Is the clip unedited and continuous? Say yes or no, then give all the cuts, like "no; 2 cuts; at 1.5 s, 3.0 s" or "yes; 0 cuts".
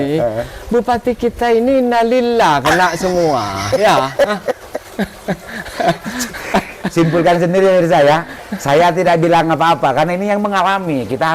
yes; 0 cuts